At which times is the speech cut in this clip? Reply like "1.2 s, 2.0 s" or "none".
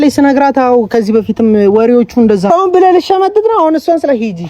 2.5 s

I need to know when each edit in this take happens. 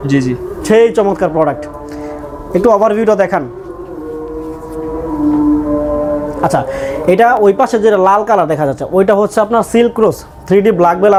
none

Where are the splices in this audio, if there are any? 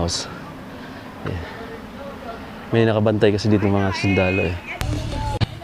4.7 s

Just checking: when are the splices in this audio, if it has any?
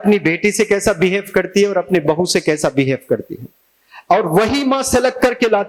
none

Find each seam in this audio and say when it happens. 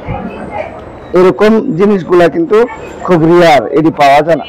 none

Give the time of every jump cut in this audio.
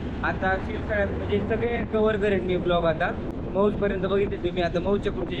3.4 s

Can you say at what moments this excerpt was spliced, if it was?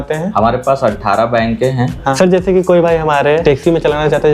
2.2 s, 3.4 s

